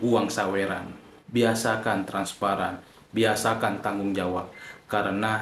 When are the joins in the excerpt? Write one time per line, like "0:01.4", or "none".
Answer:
0:01.1